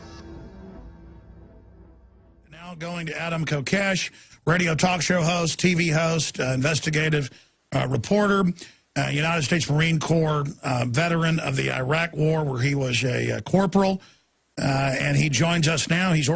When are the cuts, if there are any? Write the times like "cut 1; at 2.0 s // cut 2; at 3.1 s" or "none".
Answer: cut 1; at 3.6 s